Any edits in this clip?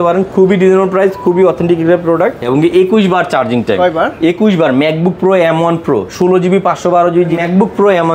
yes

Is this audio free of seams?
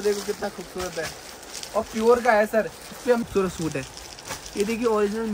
no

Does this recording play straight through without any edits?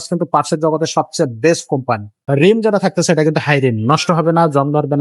no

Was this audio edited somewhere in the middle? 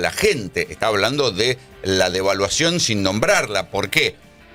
no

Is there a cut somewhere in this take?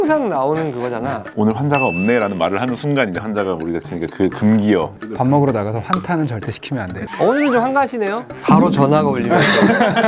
yes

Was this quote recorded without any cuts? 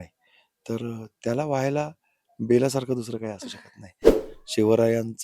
no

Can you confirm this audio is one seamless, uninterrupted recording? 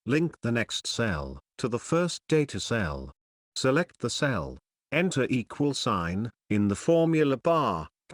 no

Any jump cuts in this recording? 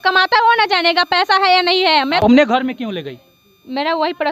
yes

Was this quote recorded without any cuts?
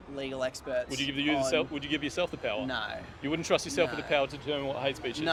yes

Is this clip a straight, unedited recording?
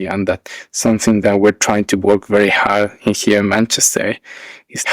yes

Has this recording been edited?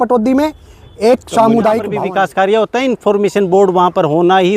yes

